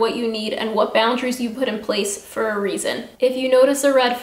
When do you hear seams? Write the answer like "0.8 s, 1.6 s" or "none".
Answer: 3.1 s